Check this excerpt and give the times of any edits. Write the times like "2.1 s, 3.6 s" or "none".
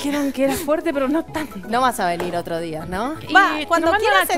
none